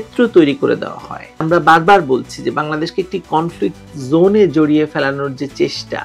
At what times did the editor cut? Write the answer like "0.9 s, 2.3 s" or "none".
1.4 s